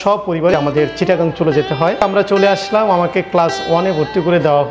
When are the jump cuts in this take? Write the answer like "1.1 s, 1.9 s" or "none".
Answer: 2.0 s